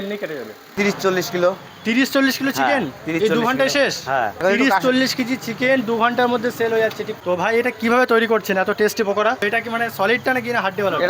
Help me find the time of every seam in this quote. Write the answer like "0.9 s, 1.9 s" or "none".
1.0 s, 4.3 s, 7.1 s, 9.4 s